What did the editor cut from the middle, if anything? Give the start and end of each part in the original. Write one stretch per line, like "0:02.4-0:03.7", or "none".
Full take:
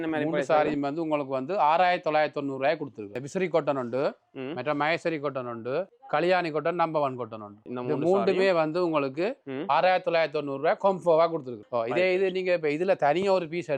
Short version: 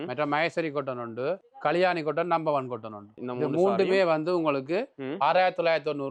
none